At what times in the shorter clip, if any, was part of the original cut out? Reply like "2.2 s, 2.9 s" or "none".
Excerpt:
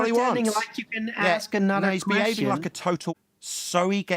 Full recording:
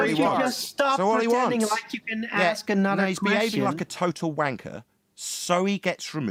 3.1 s